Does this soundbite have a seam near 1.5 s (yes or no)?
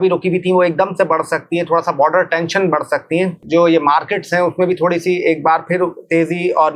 no